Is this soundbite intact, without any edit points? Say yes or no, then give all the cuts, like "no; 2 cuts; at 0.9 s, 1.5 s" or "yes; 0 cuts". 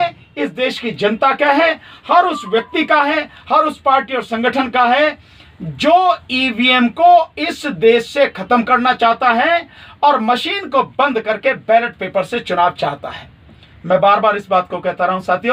yes; 0 cuts